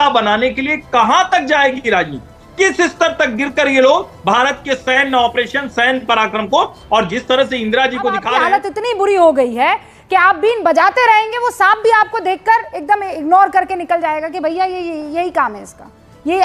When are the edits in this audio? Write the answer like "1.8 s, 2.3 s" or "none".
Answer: 8.3 s

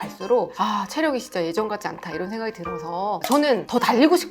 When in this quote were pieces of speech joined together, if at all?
3.2 s

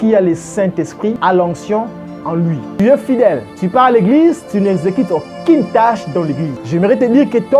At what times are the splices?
1.2 s, 2.7 s, 3.5 s, 6.5 s

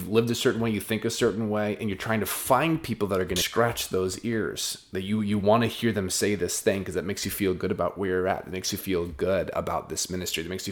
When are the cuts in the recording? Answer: 3.5 s

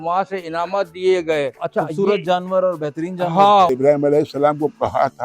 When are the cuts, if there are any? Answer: 1.6 s, 3.7 s

